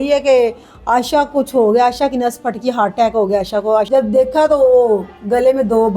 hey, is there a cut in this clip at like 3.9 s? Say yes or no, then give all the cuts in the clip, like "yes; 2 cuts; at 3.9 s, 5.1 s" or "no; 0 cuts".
yes; 1 cut; at 3.9 s